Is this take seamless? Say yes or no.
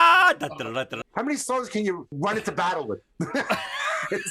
no